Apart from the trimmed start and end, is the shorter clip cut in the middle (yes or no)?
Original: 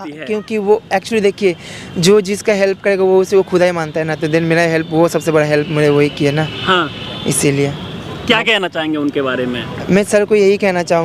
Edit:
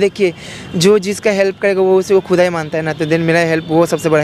no